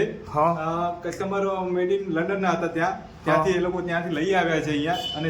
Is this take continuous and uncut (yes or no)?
yes